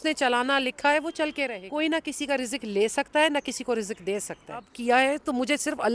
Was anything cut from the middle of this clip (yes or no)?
yes